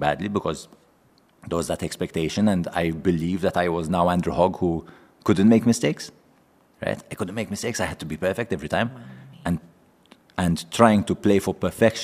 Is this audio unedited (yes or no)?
yes